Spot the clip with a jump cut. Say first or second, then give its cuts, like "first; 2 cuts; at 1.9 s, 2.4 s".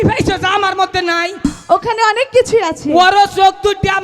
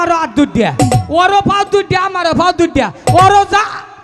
first; 1 cut; at 1.4 s